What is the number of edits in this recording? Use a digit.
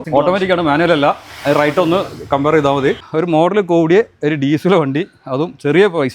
1